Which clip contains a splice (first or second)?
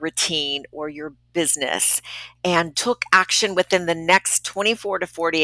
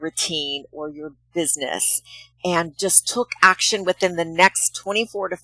first